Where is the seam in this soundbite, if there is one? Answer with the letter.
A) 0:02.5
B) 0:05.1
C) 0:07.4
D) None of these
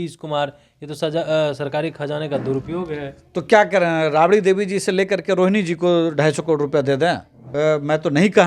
C